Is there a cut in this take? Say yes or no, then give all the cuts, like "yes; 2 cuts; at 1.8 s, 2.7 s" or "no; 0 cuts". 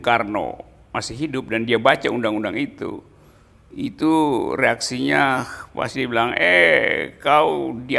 no; 0 cuts